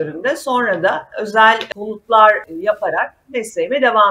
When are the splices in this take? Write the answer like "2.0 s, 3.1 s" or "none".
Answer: 2.4 s